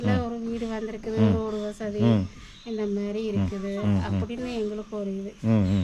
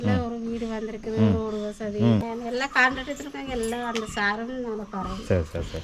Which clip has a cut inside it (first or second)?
second